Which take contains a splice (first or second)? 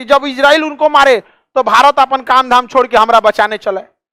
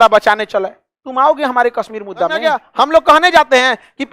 second